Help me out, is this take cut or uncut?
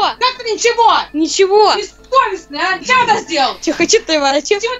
cut